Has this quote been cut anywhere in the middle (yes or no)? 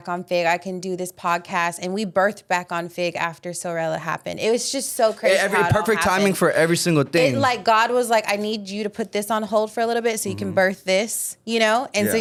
no